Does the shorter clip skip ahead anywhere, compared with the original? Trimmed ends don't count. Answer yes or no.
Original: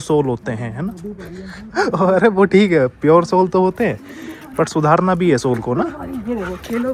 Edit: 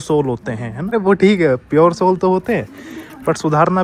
yes